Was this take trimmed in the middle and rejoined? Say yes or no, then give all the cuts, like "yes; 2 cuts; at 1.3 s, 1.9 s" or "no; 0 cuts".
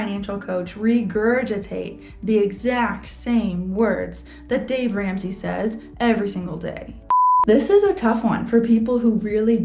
yes; 1 cut; at 7.1 s